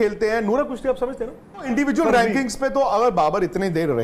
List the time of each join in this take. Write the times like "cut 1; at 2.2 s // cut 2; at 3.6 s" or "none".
cut 1; at 1.7 s